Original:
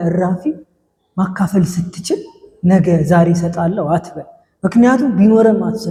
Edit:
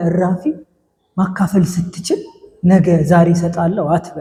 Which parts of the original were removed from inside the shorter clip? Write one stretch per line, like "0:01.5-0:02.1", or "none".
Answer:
none

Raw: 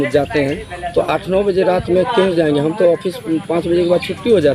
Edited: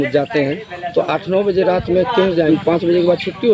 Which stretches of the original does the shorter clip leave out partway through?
0:02.5-0:03.3

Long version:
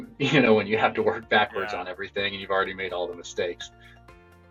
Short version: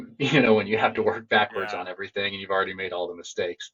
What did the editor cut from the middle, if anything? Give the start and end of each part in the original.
none

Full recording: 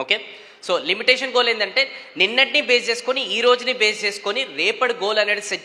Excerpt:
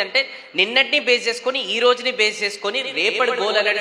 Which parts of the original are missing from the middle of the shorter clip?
none

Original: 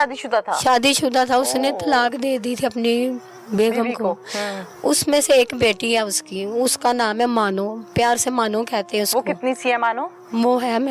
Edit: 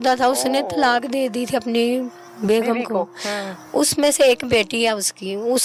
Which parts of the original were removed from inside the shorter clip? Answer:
none

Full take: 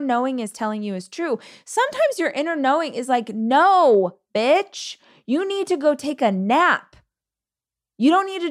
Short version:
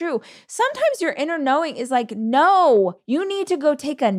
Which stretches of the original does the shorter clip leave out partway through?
0:04.2-0:05.2

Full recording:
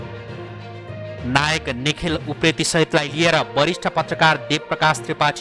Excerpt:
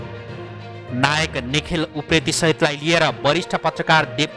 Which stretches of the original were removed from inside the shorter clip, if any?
0:00.9-0:01.2

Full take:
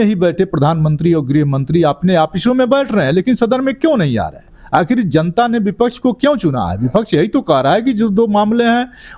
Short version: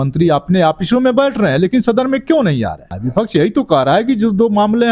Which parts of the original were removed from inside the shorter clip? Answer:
0:04.5-0:06.7

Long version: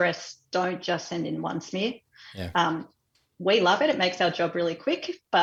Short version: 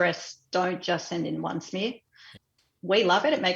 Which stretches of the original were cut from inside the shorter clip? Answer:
0:02.4-0:02.9

